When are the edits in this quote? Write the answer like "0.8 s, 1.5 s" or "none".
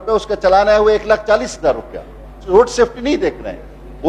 2.4 s